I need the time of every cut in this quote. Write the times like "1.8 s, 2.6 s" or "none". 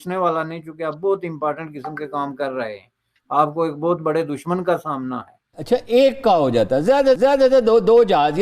5.6 s

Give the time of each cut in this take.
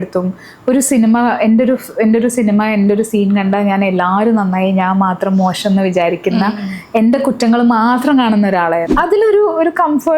8.9 s

